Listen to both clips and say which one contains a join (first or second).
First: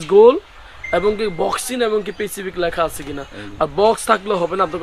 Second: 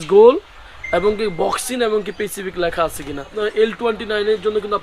second